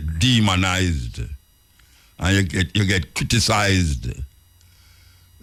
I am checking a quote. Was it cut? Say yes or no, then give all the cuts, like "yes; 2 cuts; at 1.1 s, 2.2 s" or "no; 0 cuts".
no; 0 cuts